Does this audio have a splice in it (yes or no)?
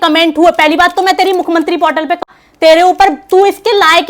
yes